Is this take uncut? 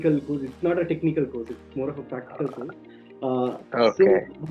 yes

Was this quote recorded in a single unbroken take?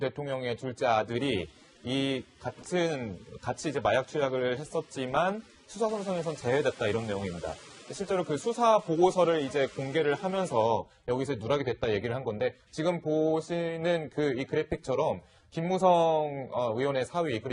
no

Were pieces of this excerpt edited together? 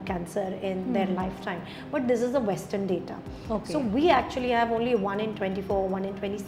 no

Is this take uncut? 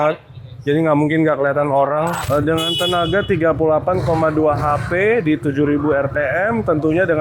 no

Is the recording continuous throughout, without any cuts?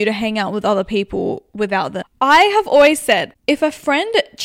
no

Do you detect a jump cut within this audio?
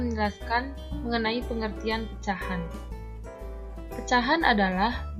no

